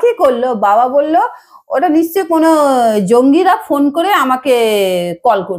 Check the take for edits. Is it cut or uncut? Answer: uncut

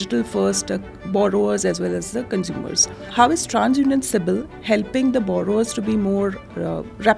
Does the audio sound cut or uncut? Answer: cut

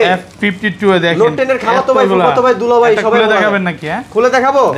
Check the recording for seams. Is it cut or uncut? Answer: uncut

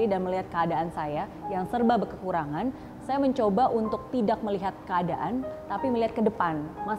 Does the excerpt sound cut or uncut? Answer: uncut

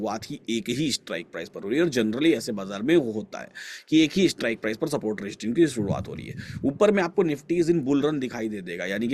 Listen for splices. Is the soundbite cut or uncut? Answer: uncut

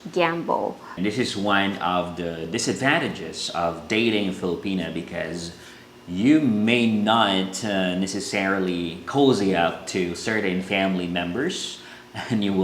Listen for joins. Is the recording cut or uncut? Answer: cut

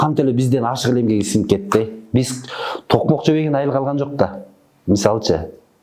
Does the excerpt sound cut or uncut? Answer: uncut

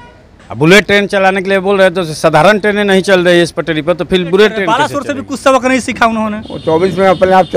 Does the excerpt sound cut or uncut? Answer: cut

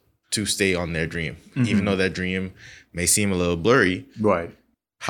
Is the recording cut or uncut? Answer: uncut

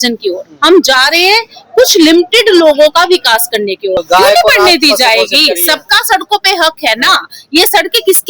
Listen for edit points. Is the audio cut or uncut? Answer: cut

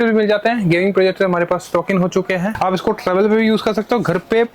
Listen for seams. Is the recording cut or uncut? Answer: cut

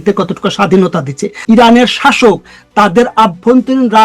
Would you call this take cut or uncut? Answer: cut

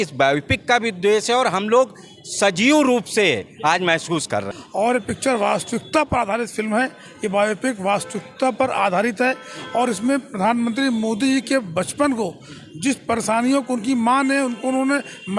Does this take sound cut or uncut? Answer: cut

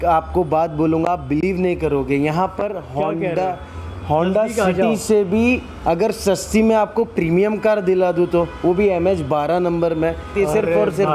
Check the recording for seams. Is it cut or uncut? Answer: uncut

